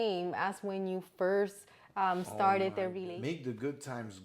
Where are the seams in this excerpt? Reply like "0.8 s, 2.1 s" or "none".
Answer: 3.0 s